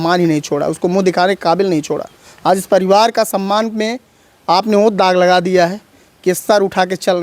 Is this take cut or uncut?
uncut